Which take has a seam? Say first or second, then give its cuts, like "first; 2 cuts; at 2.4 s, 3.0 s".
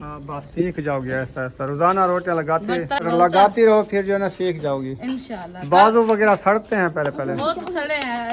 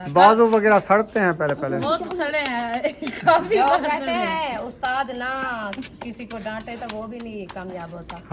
first; 1 cut; at 3.0 s